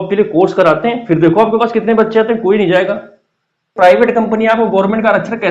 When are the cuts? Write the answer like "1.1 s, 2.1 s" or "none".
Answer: 3.7 s